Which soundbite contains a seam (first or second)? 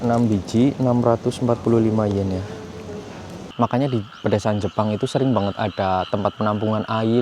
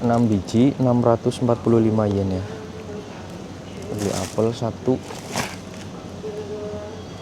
first